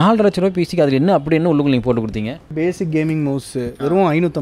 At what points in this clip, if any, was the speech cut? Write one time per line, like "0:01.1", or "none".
0:02.5